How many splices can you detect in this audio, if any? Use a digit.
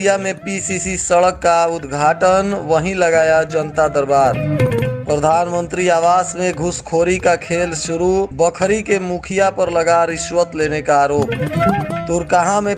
0